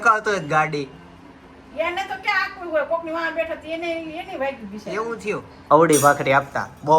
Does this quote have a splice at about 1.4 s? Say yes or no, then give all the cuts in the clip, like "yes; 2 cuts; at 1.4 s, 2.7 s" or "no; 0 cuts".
no; 1 cut; at 5.5 s